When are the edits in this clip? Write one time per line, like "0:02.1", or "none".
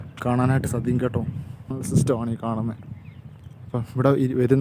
0:01.7